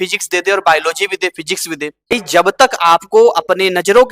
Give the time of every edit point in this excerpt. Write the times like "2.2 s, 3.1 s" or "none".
2.1 s